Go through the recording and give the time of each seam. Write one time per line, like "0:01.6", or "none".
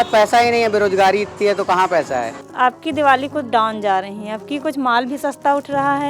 0:02.4